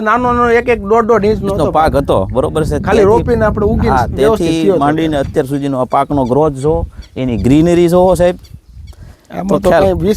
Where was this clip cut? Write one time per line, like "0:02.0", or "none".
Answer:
none